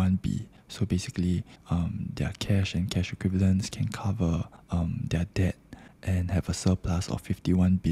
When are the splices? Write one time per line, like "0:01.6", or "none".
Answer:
none